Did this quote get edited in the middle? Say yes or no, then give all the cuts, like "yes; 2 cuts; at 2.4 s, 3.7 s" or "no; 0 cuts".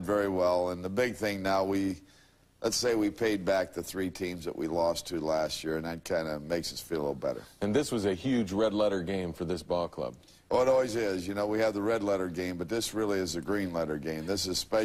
no; 0 cuts